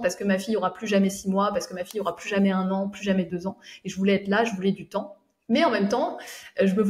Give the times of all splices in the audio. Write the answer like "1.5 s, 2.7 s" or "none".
none